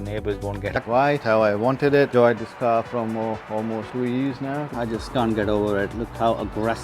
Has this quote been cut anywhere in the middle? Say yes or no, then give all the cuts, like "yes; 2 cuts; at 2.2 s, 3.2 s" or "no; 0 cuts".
yes; 2 cuts; at 0.8 s, 4.7 s